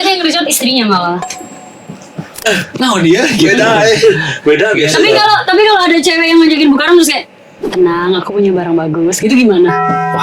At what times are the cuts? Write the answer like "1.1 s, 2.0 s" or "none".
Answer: 2.4 s

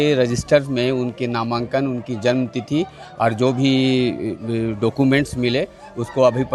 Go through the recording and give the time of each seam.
none

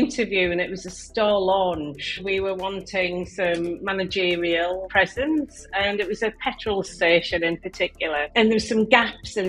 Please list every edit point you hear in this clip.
2.2 s, 4.9 s, 8.3 s

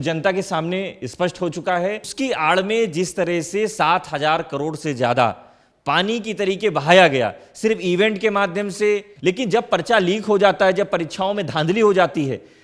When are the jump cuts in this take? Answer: 2.1 s, 9.1 s

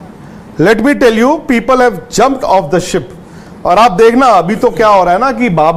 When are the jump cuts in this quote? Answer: none

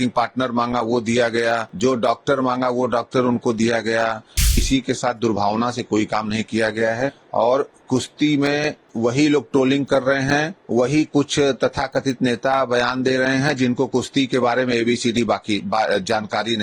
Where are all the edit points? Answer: 1.7 s, 4.6 s, 7.2 s, 8.8 s, 10.6 s

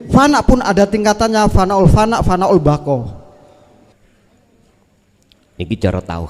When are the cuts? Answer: 3.9 s

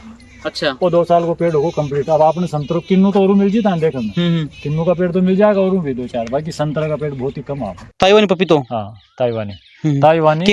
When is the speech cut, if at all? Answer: 7.8 s

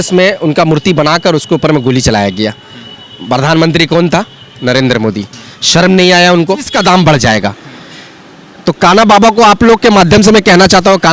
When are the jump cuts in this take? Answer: 6.7 s

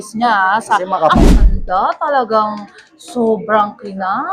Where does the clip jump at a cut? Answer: 1.3 s

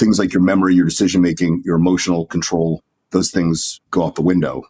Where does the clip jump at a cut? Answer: 3.7 s

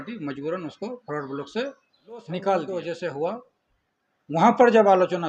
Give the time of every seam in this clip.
2.7 s

